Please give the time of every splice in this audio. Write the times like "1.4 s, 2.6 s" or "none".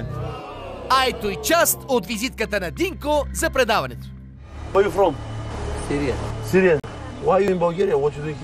6.5 s